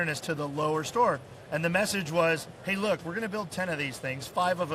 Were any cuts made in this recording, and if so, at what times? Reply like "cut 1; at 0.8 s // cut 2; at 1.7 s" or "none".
none

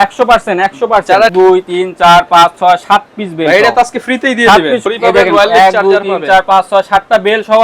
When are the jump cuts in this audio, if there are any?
cut 1; at 1.3 s // cut 2; at 4.8 s

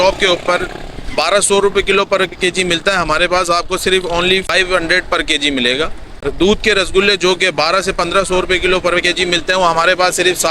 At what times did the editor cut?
cut 1; at 4.5 s // cut 2; at 6.1 s

